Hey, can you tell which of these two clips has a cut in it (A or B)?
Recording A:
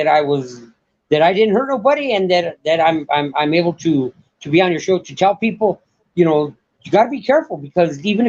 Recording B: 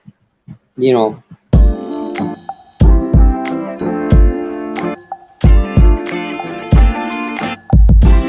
B